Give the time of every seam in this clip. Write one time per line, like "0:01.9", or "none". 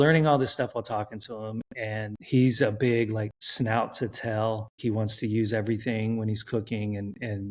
0:04.7